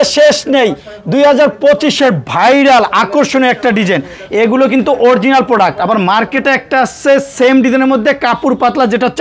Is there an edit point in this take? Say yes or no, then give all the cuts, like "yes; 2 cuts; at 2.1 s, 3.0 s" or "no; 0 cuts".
no; 0 cuts